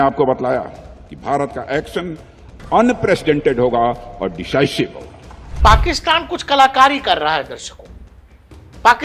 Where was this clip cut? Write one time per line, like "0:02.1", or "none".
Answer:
0:05.6